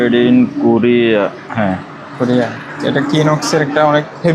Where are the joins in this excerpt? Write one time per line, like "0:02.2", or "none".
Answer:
none

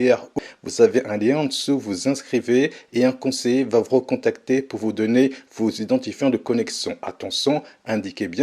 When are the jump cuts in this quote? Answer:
none

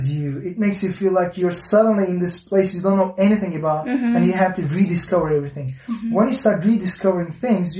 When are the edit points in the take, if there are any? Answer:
none

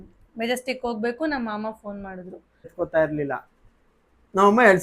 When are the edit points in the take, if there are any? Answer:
0:02.7

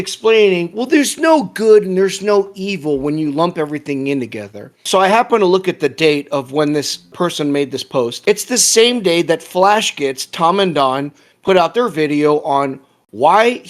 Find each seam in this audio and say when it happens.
none

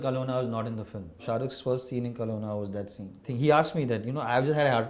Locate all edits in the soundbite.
0:01.2
0:03.3

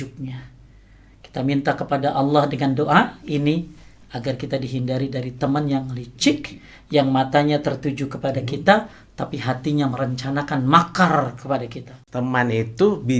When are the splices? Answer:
0:12.0

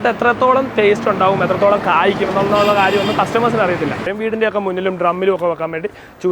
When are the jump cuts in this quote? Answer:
0:04.0

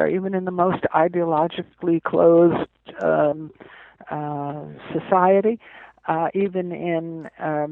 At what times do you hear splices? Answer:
none

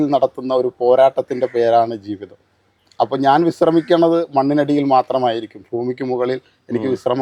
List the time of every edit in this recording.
none

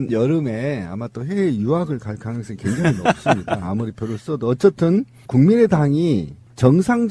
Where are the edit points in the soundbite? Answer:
0:02.0

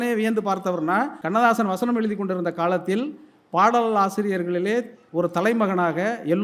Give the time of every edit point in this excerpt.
0:01.2
0:05.0

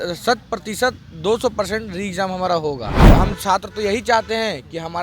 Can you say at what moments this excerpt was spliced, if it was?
0:03.1

